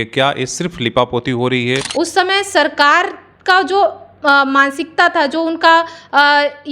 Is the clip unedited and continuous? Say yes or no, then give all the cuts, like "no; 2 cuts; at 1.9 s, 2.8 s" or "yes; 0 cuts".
no; 1 cut; at 1.9 s